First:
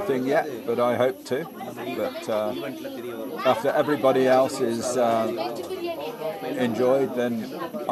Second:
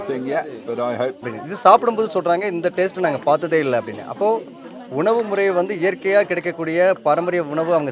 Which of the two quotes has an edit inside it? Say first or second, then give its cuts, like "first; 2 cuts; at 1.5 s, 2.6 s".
second; 1 cut; at 1.3 s